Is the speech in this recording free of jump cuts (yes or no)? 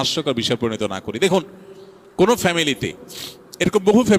yes